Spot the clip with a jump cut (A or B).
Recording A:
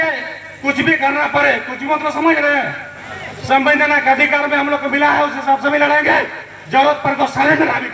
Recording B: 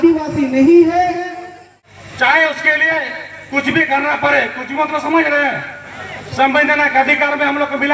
B